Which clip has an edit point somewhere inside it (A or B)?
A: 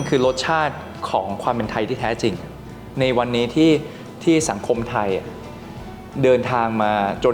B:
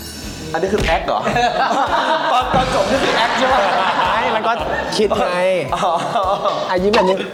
A